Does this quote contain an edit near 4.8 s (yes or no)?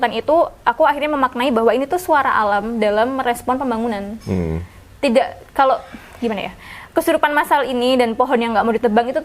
no